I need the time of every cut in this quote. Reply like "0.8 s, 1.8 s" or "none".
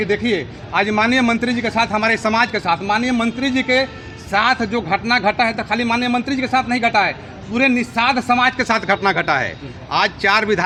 none